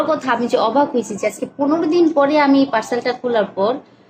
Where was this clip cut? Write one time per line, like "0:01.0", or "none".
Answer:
none